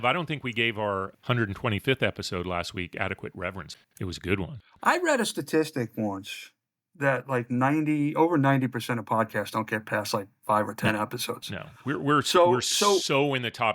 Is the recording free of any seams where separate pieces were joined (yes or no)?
no